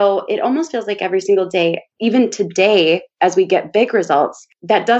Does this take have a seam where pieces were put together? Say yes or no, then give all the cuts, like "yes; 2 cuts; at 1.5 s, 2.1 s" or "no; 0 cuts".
yes; 1 cut; at 1.9 s